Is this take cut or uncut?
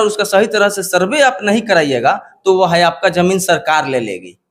uncut